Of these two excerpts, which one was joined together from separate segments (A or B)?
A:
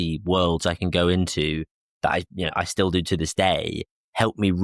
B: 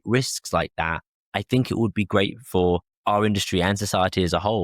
B